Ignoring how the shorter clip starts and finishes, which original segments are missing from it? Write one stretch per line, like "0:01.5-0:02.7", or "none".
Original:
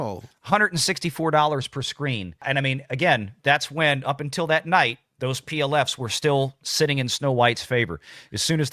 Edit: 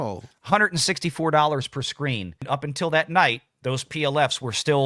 0:02.4-0:04.0